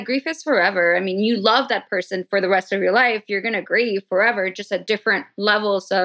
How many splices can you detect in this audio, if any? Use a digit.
0